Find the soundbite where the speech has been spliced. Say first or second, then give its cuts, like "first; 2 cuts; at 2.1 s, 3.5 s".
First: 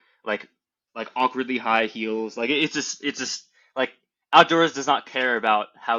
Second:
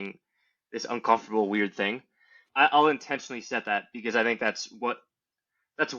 second; 1 cut; at 2.4 s